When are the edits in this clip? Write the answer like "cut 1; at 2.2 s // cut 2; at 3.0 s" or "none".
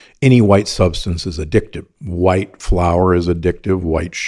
cut 1; at 2.0 s